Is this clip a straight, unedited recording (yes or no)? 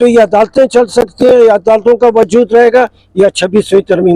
yes